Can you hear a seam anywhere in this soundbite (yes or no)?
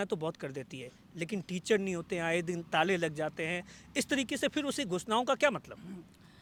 no